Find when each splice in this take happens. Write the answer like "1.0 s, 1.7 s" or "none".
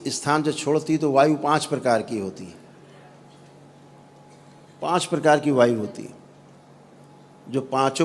7.0 s